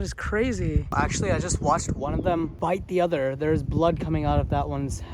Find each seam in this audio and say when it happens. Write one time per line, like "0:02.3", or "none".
0:00.9
0:02.5

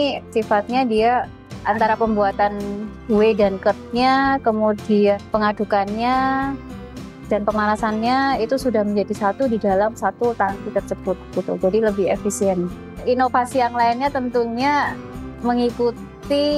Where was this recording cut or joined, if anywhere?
0:12.8

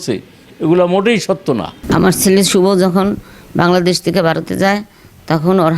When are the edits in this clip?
0:01.7

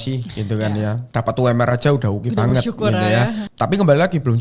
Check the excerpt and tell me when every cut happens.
0:01.0
0:03.5

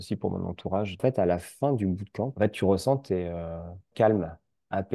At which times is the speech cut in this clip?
0:01.0
0:02.3
0:03.9

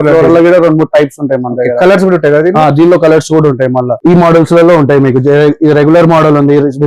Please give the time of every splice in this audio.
0:03.9

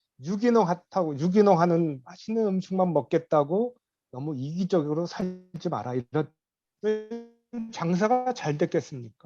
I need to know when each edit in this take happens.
0:06.4

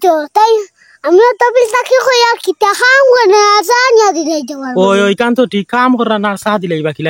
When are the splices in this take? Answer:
none

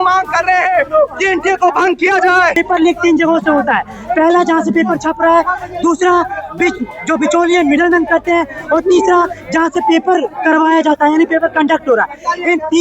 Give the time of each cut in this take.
0:02.6

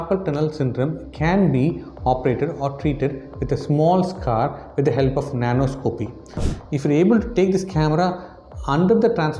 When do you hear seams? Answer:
0:06.5

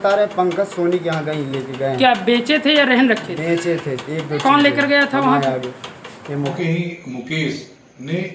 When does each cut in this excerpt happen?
0:06.5

